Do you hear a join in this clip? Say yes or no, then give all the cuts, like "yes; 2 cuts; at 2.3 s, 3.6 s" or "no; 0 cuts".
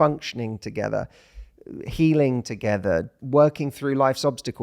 yes; 1 cut; at 3.2 s